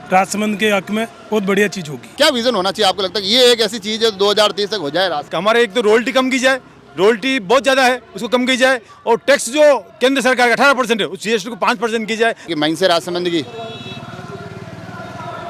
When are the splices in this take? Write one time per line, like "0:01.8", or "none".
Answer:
0:02.0
0:05.3
0:12.5

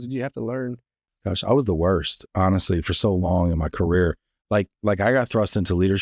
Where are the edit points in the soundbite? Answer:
0:01.0

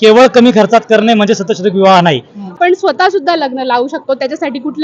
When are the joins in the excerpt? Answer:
0:02.5

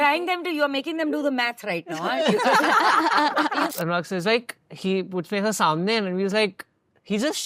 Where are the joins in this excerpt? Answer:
0:03.7

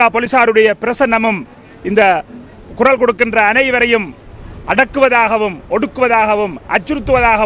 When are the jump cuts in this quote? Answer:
none

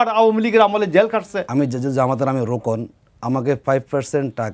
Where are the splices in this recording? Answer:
0:01.4

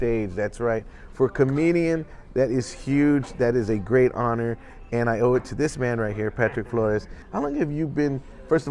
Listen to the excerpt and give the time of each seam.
0:07.2

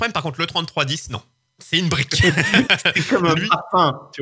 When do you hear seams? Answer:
none

